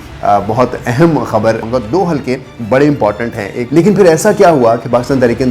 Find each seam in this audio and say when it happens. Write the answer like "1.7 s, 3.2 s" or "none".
1.6 s, 3.6 s